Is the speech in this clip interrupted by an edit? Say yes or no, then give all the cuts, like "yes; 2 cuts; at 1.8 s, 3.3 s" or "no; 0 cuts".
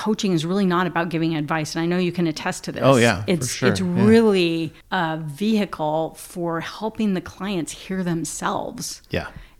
no; 0 cuts